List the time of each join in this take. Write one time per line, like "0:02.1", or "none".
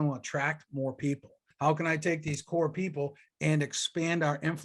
0:01.4